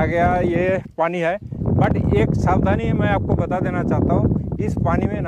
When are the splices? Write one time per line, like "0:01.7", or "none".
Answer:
none